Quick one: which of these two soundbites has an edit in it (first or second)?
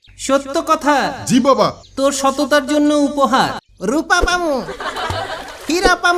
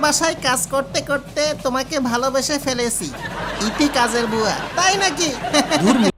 first